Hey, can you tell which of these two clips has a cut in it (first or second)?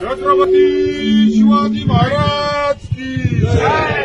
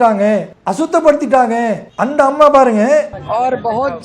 second